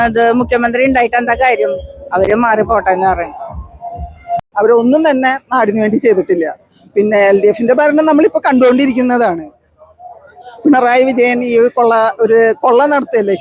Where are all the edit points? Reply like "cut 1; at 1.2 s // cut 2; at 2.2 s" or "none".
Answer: cut 1; at 4.4 s